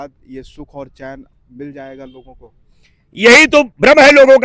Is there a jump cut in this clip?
no; 0 cuts

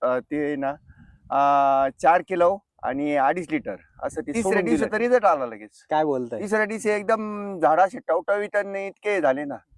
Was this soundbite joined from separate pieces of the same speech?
yes; 1 cut; at 4.9 s

